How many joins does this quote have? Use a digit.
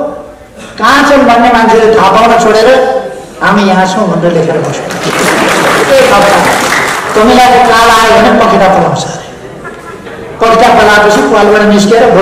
1